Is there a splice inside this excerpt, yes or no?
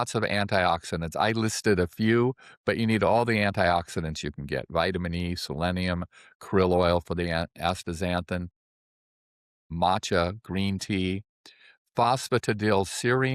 no